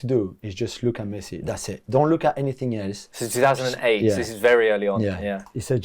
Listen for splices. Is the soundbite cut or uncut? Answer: uncut